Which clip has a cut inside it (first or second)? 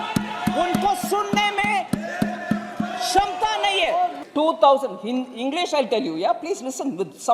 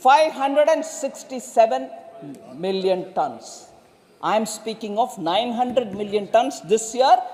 first